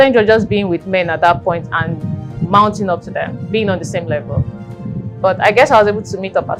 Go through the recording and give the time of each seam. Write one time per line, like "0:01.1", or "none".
none